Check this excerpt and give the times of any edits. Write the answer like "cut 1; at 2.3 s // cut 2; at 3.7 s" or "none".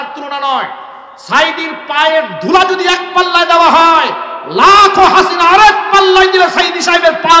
none